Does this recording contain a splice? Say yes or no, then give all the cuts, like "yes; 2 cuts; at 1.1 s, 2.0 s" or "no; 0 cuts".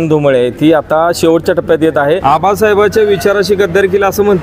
yes; 1 cut; at 2.2 s